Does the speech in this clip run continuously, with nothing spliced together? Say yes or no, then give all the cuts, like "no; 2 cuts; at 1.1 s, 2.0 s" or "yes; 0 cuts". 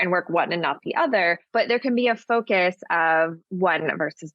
no; 2 cuts; at 1.5 s, 3.4 s